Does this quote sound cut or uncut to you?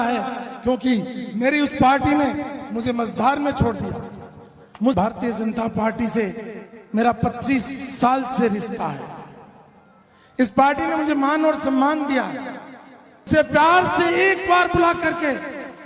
cut